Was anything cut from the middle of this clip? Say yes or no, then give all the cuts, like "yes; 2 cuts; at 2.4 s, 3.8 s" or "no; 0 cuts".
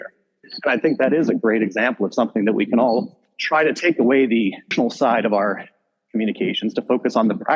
yes; 1 cut; at 4.7 s